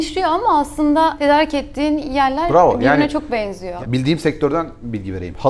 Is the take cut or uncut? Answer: cut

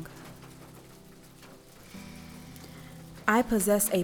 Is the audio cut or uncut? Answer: uncut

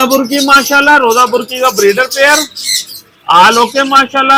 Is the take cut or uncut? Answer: uncut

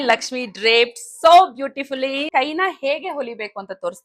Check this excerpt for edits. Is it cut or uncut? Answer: cut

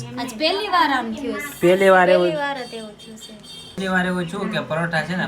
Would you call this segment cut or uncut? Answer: cut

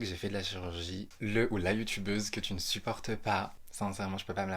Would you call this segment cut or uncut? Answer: cut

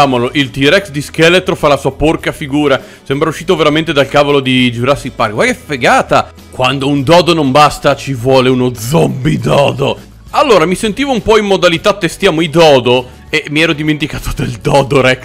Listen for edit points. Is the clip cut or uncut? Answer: cut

